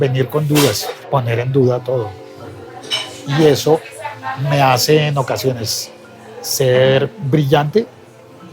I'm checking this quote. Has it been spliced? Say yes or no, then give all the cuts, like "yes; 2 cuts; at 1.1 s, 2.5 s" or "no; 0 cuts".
yes; 1 cut; at 0.9 s